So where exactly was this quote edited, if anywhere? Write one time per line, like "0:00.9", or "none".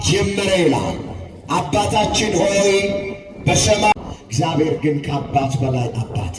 0:03.9